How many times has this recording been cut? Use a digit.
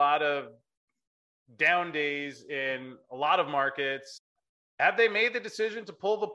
1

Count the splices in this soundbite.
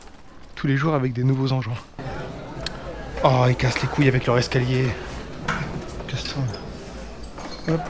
1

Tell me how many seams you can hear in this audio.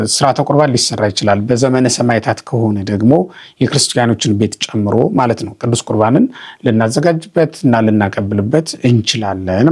0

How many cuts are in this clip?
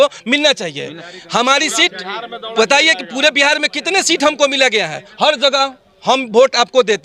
0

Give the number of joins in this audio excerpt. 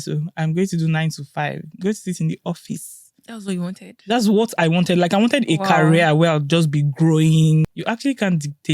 1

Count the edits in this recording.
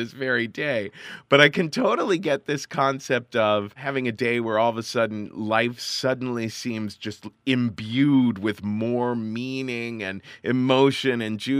1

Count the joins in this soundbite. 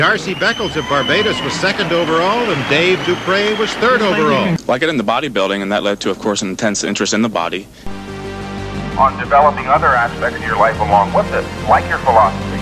2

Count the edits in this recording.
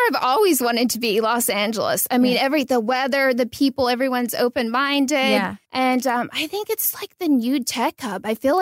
1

